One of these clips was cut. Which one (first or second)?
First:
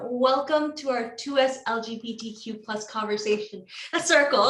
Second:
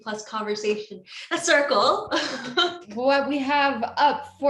second